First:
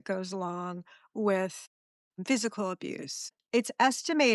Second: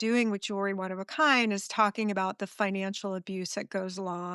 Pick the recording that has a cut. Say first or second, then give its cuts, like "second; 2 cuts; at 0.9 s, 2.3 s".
first; 1 cut; at 3.4 s